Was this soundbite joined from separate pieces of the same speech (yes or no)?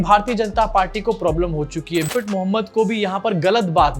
yes